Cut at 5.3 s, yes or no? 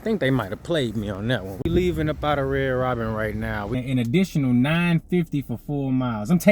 no